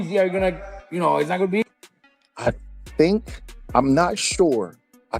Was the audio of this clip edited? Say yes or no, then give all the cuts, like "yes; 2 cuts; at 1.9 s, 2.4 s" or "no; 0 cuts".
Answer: yes; 1 cut; at 1.6 s